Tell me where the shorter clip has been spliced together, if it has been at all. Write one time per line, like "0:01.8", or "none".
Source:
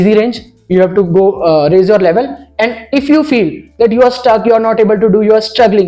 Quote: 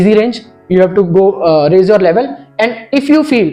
none